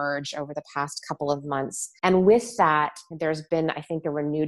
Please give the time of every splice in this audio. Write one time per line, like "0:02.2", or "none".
0:01.8
0:03.0